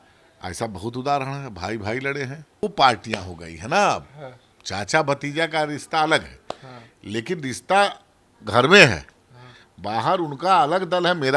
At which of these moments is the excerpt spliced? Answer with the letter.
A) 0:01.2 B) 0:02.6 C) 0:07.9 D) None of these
B